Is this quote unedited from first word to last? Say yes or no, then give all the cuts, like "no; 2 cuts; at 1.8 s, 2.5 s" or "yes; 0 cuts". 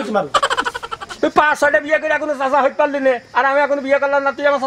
no; 1 cut; at 1.1 s